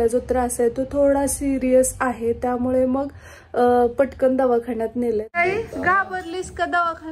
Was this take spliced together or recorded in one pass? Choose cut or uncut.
cut